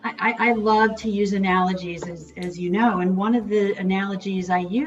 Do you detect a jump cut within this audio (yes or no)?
no